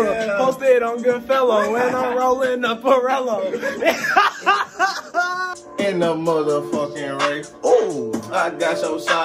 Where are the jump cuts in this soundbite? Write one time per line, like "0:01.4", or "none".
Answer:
0:05.6

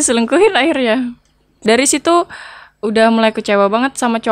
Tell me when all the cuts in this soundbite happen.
0:01.6

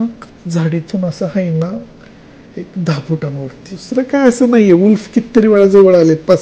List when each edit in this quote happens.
0:03.9

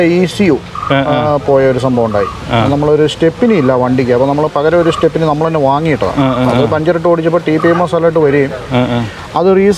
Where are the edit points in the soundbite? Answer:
none

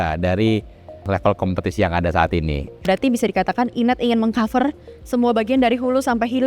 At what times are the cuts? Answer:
0:01.0
0:02.8

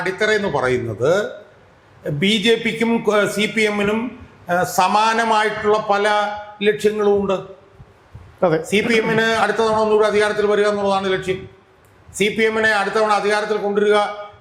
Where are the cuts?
none

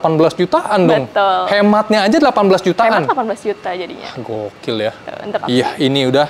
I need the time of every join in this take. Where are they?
none

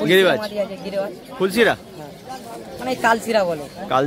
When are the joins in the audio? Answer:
none

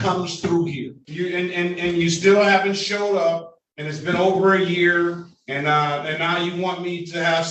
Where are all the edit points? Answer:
0:01.0

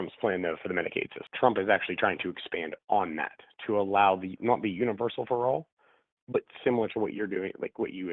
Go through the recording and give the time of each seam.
0:01.2

